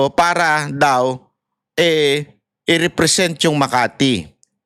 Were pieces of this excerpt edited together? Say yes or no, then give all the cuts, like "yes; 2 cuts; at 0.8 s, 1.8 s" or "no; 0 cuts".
no; 0 cuts